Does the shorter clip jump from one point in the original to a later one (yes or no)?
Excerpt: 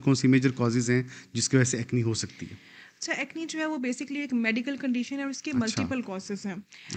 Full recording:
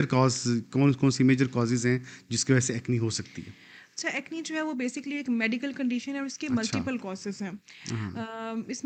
no